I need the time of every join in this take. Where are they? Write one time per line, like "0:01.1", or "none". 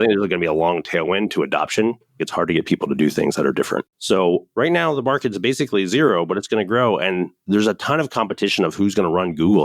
0:02.2
0:04.1
0:07.4